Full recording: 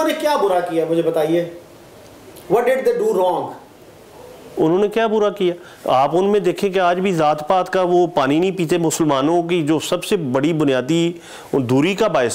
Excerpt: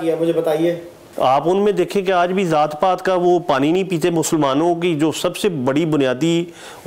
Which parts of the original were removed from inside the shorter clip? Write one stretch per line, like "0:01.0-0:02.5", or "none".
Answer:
0:01.7-0:05.7